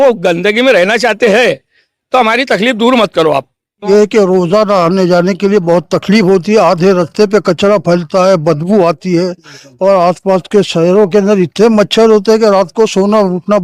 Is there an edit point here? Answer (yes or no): yes